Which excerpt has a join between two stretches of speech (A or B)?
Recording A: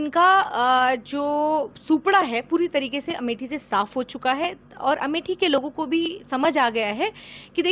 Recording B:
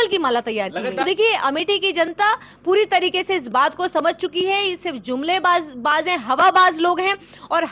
B